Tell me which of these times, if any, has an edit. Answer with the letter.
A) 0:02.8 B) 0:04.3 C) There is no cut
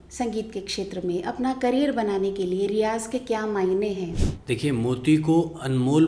B